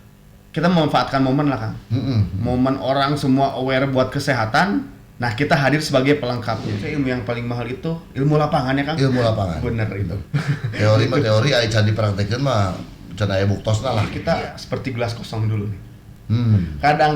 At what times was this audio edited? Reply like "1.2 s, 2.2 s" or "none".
6.8 s, 14.1 s